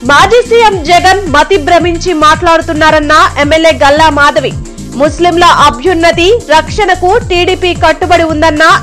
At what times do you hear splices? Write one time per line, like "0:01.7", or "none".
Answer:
none

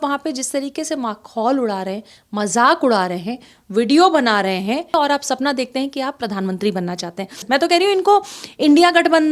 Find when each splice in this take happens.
0:04.9
0:07.4

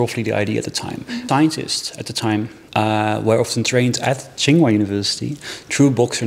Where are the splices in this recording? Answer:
0:01.2

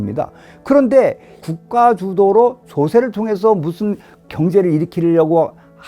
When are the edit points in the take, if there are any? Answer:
0:01.4
0:04.3

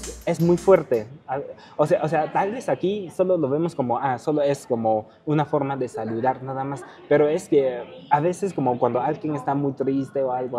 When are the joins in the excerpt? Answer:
none

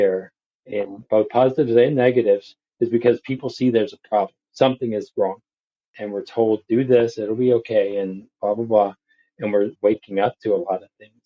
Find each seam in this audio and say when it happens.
0:09.7

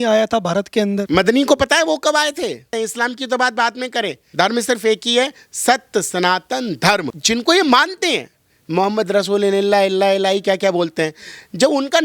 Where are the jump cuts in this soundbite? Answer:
0:01.0
0:02.7
0:07.1

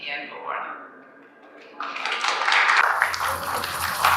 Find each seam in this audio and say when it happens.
0:02.8

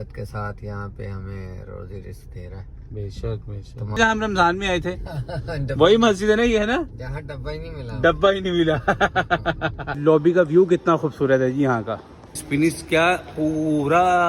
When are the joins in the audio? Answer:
0:04.0
0:09.9

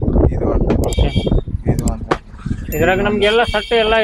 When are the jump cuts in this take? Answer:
none

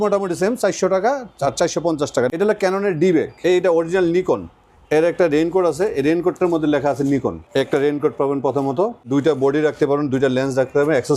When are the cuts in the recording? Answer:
0:02.3
0:03.3
0:07.4
0:09.1

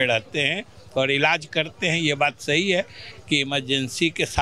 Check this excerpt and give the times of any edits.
none

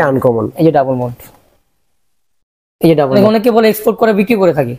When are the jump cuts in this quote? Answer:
0:03.1

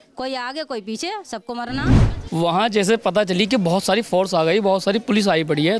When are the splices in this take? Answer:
0:02.1

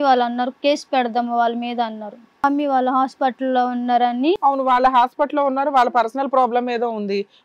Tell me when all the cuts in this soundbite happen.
0:02.4

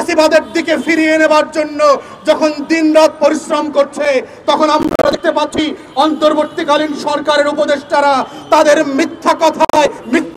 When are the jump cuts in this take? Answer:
none

